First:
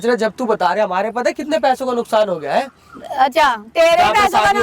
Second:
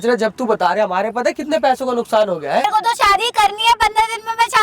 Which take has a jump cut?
second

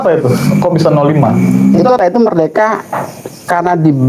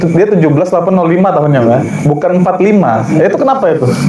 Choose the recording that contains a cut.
first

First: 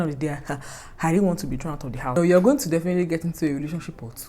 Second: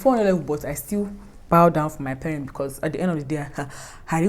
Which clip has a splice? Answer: first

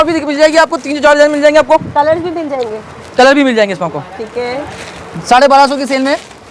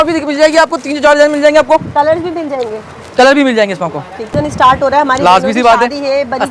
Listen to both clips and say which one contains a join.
second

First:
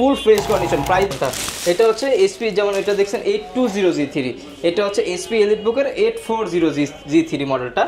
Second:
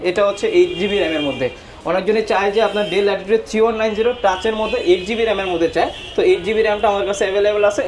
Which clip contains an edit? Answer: first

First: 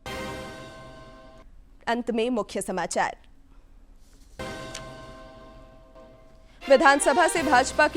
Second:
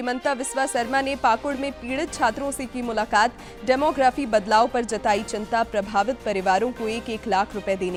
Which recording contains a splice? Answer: first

